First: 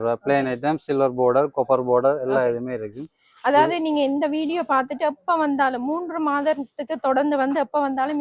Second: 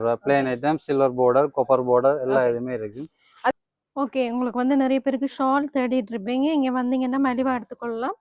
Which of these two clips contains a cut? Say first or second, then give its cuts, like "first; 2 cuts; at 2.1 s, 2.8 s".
second; 1 cut; at 3.5 s